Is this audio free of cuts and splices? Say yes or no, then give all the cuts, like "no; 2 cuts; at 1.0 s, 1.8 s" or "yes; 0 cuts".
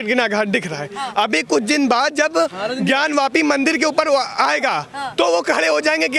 yes; 0 cuts